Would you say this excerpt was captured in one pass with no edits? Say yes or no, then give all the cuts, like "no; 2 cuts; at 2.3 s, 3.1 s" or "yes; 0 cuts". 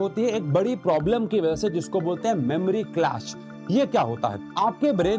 yes; 0 cuts